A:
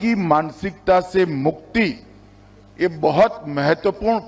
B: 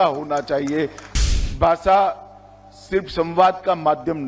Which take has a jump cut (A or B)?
B